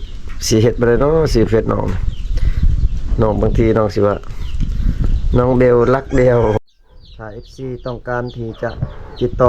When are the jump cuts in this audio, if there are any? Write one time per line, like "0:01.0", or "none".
0:06.6